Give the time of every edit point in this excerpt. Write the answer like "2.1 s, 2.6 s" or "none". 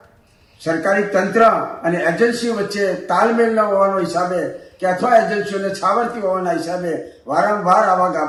none